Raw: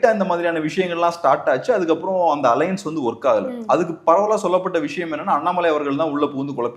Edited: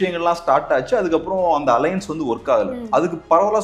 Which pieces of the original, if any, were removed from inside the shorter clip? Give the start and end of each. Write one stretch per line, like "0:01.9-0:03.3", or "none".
none